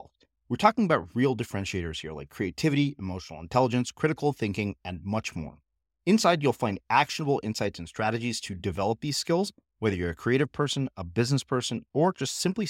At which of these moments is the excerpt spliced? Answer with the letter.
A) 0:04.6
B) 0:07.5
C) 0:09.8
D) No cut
D